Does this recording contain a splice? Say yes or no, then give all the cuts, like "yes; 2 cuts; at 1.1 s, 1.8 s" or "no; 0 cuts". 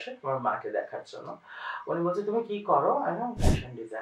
no; 0 cuts